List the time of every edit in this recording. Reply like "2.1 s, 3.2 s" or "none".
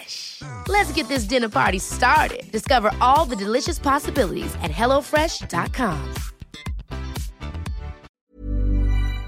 8.2 s